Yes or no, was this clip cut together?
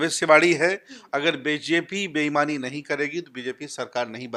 no